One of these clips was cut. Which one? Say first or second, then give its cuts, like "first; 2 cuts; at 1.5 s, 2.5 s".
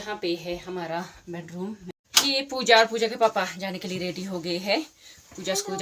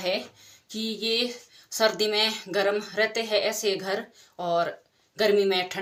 first; 1 cut; at 1.9 s